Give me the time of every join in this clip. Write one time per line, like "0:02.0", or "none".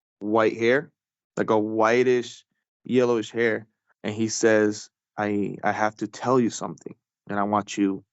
0:05.0

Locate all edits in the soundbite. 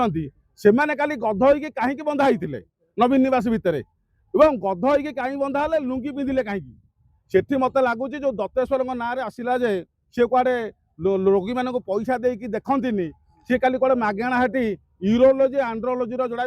none

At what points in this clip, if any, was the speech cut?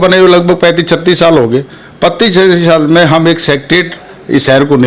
none

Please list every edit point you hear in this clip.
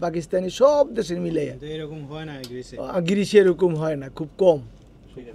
none

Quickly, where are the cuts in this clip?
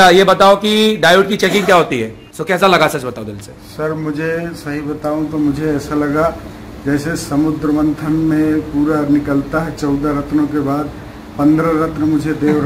0:02.2

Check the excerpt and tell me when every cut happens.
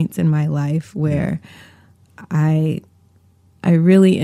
none

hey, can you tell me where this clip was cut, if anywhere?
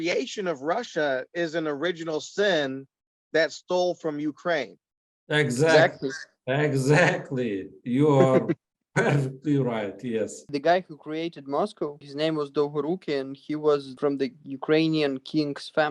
none

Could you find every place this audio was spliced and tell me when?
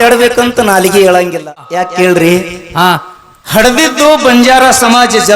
0:01.7

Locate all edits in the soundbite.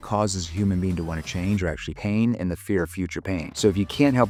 none

